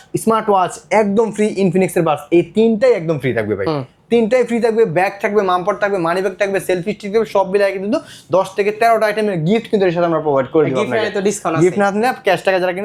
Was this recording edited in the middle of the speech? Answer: no; 0 cuts

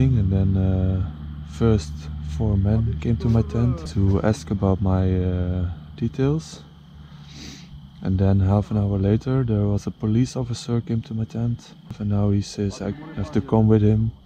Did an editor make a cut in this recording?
yes; 2 cuts; at 3.8 s, 12.0 s

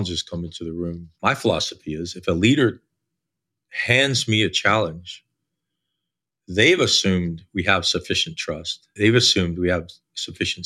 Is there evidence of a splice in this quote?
yes; 2 cuts; at 1.1 s, 8.8 s

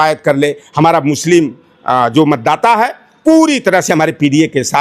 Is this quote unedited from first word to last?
yes; 0 cuts

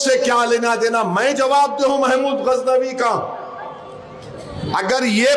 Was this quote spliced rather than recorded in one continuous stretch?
no; 0 cuts

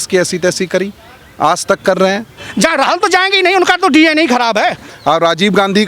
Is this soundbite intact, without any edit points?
no; 2 cuts; at 2.4 s, 4.9 s

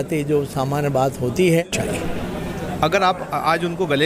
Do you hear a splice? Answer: yes; 1 cut; at 1.8 s

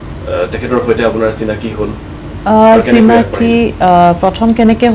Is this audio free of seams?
yes; 0 cuts

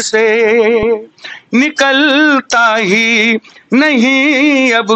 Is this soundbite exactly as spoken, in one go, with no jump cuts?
yes; 0 cuts

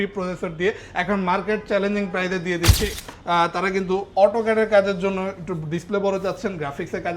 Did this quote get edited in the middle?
yes; 1 cut; at 3.0 s

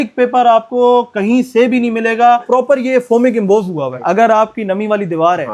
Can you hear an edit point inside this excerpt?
yes; 2 cuts; at 2.4 s, 4.0 s

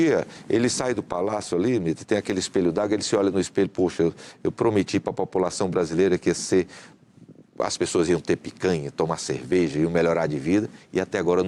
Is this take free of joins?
yes; 0 cuts

